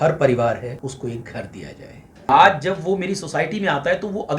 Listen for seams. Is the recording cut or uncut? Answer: cut